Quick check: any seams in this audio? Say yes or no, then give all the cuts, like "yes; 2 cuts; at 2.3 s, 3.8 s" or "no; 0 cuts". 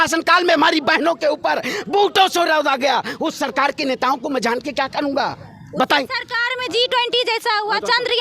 no; 0 cuts